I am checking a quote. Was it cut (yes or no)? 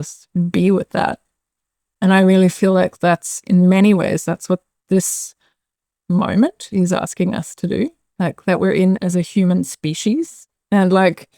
no